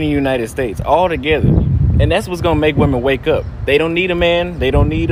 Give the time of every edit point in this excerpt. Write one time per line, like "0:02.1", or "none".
none